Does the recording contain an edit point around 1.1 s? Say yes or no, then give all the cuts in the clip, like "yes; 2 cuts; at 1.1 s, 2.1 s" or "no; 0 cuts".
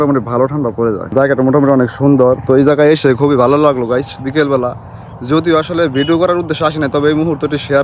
yes; 1 cut; at 1.1 s